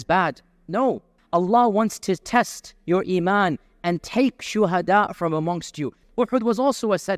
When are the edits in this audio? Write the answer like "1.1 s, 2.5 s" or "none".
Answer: 1.1 s, 5.9 s